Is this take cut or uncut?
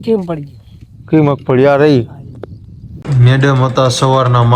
cut